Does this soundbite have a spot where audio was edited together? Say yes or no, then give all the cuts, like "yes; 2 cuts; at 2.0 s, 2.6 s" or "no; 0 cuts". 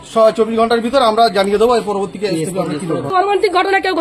yes; 1 cut; at 3.1 s